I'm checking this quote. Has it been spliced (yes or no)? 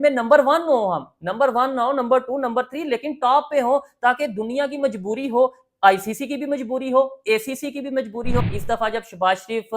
yes